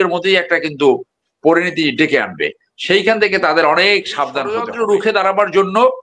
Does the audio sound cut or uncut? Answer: cut